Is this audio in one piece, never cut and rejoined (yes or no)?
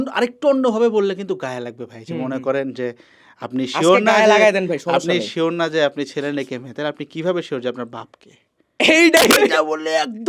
yes